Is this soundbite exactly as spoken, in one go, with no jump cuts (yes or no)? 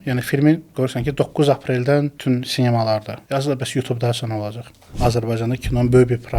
no